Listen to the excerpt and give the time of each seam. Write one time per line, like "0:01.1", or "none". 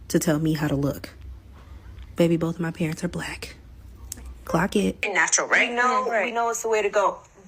0:05.0

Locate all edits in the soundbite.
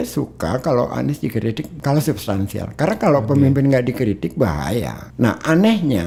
none

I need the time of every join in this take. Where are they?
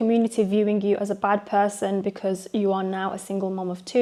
none

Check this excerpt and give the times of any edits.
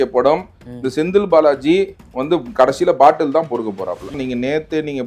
0:04.1

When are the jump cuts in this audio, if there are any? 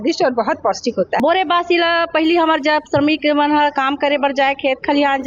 0:01.1

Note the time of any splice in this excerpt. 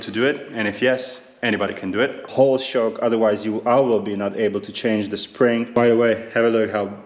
0:02.3
0:05.8

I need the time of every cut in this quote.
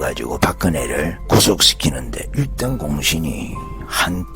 0:01.2

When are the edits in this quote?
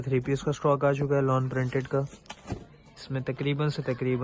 none

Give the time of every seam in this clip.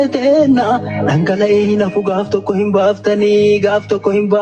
none

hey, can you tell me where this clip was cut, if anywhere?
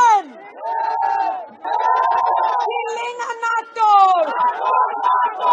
0:01.6

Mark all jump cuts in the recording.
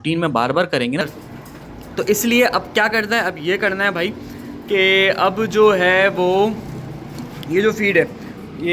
0:01.0

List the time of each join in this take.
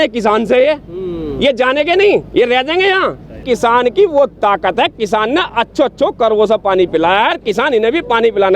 0:03.4

